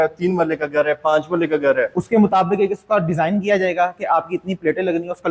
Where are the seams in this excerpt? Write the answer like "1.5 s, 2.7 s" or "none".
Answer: none